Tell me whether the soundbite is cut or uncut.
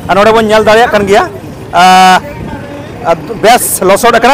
uncut